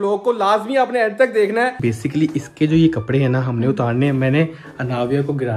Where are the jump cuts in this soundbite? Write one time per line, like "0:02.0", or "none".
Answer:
0:01.8